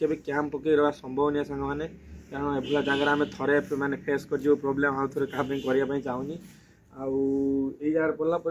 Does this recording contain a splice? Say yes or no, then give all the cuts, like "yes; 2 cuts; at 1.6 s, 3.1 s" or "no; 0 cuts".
no; 0 cuts